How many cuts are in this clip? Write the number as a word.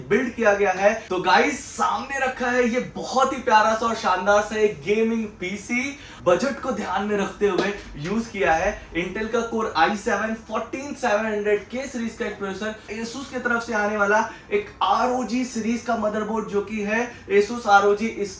three